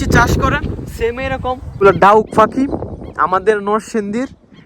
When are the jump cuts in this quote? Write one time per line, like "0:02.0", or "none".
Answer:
0:01.7